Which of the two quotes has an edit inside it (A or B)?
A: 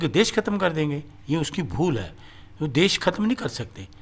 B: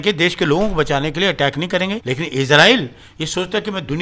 B